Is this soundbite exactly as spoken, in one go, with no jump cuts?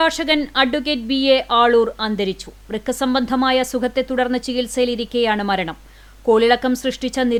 yes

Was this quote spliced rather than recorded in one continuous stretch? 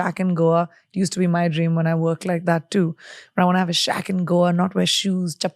no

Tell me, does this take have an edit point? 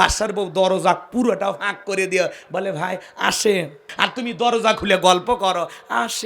yes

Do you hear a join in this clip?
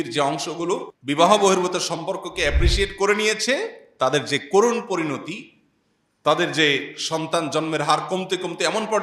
yes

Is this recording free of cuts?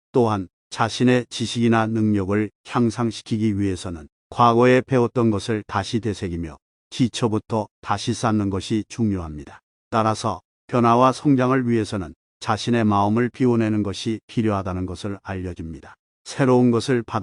yes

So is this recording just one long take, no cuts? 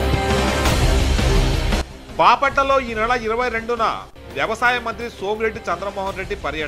yes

